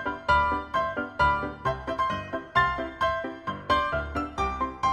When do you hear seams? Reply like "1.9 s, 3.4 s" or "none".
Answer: none